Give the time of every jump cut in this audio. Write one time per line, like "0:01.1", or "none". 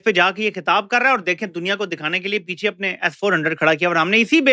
none